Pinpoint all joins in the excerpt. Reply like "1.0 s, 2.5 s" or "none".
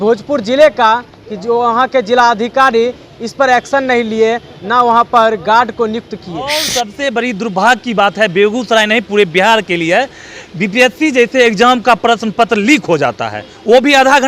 6.5 s